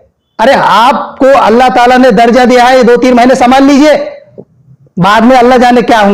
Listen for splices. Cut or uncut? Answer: uncut